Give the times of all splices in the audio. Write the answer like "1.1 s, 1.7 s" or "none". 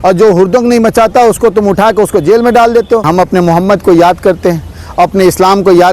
3.1 s